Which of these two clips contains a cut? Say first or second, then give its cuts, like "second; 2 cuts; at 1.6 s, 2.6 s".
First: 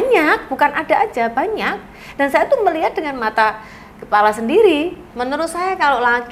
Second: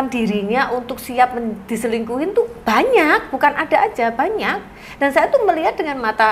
first; 1 cut; at 5.0 s